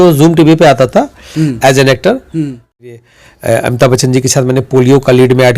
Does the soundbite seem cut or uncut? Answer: cut